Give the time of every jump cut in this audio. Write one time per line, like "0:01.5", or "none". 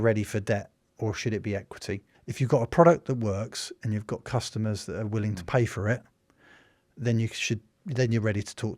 0:02.2